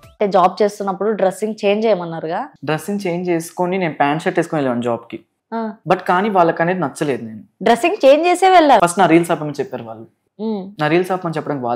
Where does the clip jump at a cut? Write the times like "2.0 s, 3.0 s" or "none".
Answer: 5.7 s, 7.4 s, 8.8 s